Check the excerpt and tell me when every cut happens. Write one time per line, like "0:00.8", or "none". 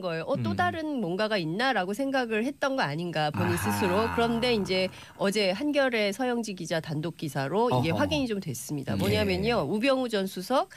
0:04.3